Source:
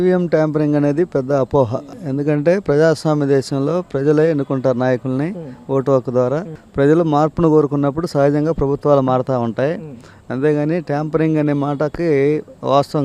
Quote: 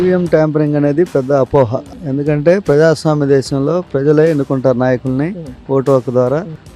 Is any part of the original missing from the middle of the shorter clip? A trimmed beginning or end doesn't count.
no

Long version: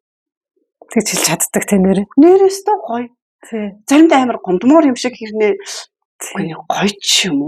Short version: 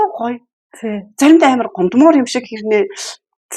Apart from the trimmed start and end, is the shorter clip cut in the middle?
no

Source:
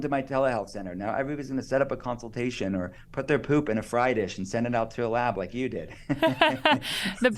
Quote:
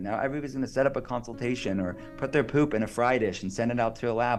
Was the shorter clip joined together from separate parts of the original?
no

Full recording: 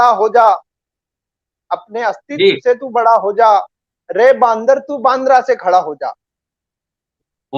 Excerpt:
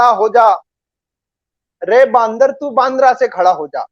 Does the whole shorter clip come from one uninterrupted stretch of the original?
no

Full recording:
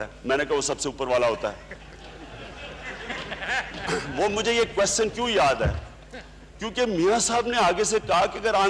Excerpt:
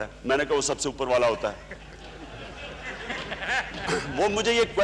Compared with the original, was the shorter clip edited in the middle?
no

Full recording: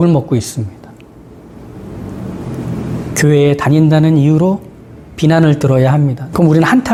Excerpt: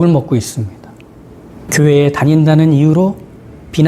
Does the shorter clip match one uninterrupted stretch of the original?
no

